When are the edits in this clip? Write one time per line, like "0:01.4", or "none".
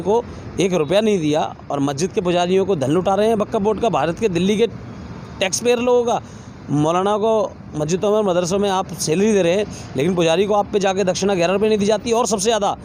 none